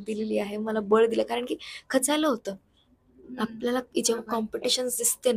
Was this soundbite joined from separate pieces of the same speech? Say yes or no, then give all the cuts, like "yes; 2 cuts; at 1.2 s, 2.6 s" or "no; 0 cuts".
no; 0 cuts